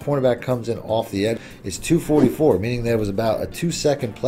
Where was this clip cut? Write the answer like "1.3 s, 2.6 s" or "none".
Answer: 1.7 s